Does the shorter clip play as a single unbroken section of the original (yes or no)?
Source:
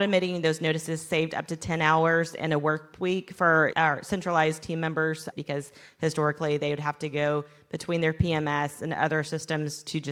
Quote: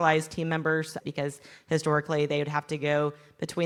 yes